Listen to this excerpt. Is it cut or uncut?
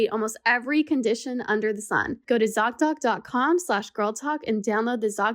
cut